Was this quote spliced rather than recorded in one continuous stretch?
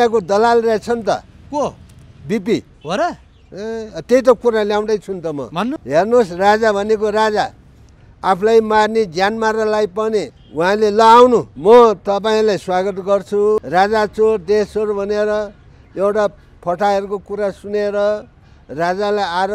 yes; 5 cuts; at 2.7 s, 5.8 s, 10.4 s, 11.5 s, 13.6 s

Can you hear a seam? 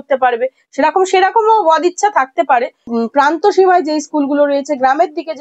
yes; 1 cut; at 2.8 s

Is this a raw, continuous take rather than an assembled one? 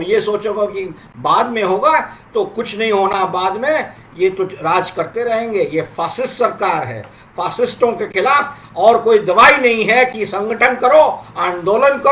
yes; 0 cuts

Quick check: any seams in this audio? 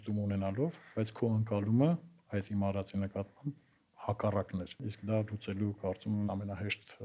yes; 2 cuts; at 4.9 s, 6.3 s

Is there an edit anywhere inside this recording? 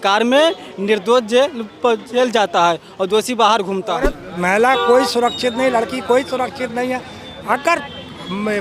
yes; 1 cut; at 4.2 s

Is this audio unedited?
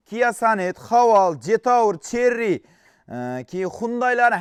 yes; 0 cuts

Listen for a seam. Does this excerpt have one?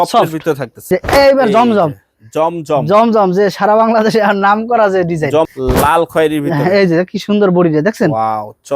yes; 2 cuts; at 0.9 s, 5.5 s

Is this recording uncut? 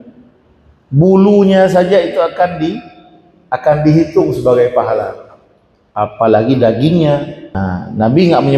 no; 1 cut; at 7.6 s

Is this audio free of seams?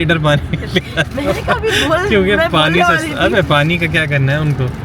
yes; 0 cuts

